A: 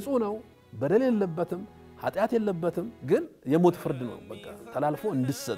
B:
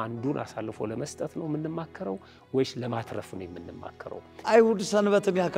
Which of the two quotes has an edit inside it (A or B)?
B